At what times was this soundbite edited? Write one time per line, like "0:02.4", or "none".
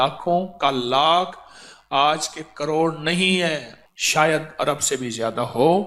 0:03.7